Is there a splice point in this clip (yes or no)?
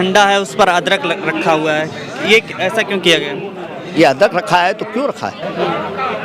yes